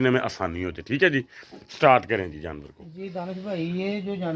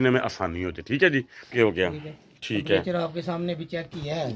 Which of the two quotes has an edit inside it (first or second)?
second